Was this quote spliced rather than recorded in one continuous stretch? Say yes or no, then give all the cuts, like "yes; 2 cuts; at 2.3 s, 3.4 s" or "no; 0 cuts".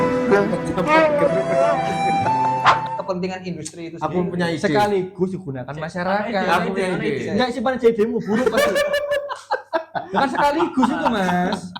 yes; 1 cut; at 3.0 s